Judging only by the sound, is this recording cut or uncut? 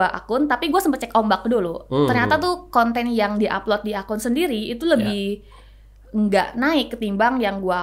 uncut